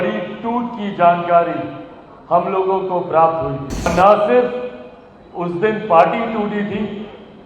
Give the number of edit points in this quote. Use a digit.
1